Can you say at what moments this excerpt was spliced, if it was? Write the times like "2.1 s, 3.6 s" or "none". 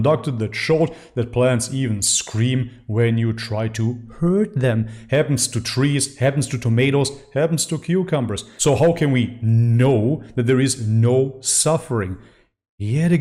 none